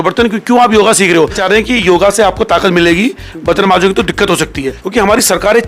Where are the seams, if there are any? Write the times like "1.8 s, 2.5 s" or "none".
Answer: 1.4 s, 4.7 s